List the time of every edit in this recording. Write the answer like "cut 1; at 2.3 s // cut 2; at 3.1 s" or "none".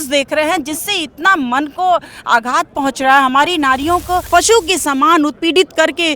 cut 1; at 4.2 s